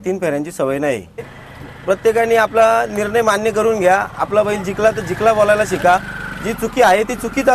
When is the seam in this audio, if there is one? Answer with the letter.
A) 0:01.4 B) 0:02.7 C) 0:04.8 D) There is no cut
A